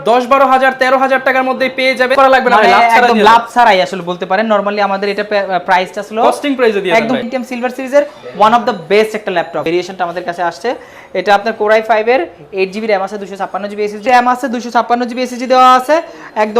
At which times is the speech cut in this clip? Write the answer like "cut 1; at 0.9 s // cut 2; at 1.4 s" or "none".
cut 1; at 2.1 s // cut 2; at 7.2 s // cut 3; at 9.6 s // cut 4; at 14.0 s